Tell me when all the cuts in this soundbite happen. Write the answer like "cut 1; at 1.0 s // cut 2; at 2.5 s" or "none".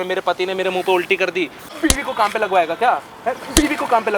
cut 1; at 1.7 s